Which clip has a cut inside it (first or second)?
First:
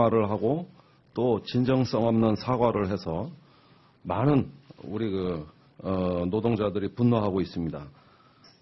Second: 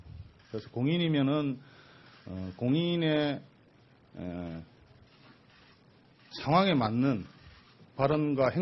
second